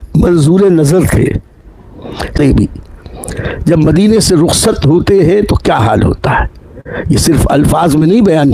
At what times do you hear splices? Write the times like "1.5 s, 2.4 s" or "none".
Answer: 2.4 s